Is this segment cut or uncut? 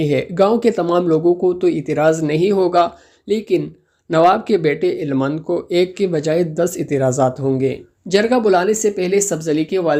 uncut